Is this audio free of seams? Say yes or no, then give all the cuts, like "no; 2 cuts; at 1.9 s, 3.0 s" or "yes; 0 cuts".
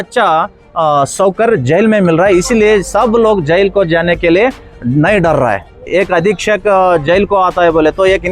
no; 1 cut; at 5.9 s